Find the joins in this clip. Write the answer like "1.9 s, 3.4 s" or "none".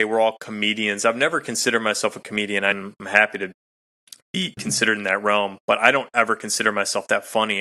2.7 s